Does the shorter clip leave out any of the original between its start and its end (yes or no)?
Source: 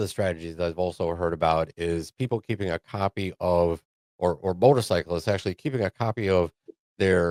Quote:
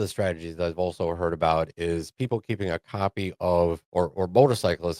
yes